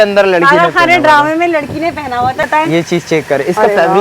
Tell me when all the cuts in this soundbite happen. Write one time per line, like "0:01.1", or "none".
0:02.4